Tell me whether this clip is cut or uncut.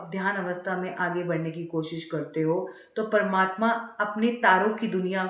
uncut